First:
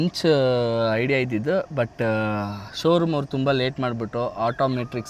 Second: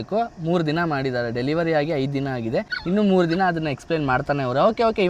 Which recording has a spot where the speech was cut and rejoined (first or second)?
second